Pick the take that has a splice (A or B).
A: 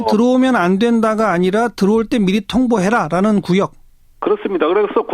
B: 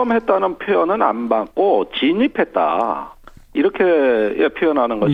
A